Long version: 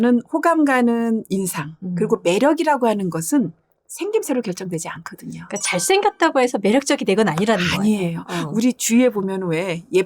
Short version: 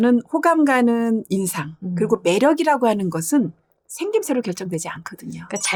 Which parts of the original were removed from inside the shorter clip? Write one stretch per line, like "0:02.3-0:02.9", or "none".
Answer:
none